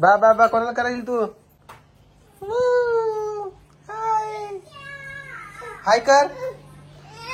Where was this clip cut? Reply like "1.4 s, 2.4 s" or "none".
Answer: none